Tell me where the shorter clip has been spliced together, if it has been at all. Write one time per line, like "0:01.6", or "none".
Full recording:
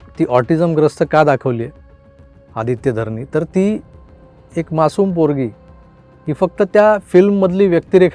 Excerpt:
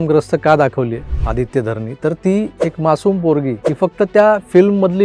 0:01.1
0:02.5
0:03.6